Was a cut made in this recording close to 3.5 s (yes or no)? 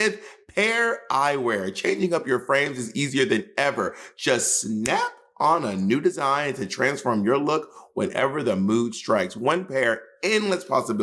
no